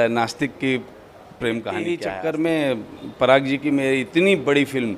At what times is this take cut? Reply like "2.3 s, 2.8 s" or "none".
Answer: 2.0 s